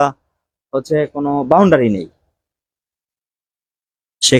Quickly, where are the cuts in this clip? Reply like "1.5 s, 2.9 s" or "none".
none